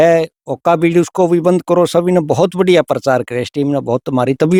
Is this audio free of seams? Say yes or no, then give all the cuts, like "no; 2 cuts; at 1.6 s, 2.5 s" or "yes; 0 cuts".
yes; 0 cuts